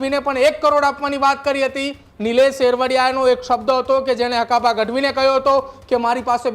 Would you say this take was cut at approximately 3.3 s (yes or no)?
no